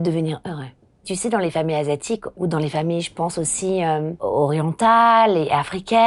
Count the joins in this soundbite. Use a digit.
3